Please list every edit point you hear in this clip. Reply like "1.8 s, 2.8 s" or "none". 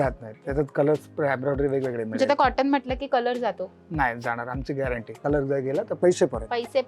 5.2 s, 5.9 s